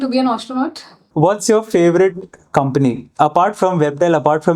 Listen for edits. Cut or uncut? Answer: cut